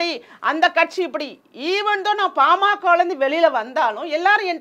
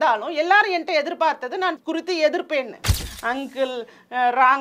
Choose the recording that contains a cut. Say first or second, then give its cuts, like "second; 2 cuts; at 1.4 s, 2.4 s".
second; 2 cuts; at 1.8 s, 3.1 s